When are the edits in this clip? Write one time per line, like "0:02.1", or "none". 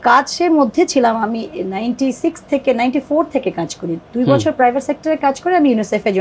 none